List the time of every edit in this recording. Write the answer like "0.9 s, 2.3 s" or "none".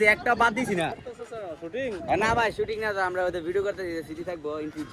0.9 s